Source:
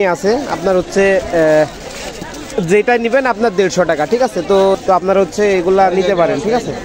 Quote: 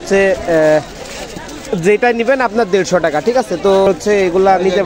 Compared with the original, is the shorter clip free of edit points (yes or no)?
no